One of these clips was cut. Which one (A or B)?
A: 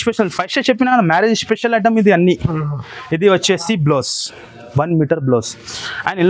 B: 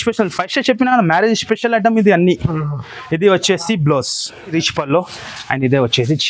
B